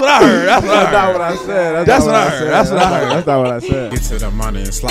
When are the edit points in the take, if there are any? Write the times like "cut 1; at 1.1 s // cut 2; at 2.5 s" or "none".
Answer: cut 1; at 3.9 s